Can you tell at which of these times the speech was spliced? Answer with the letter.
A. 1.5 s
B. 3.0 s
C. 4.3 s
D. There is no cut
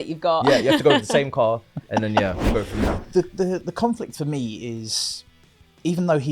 B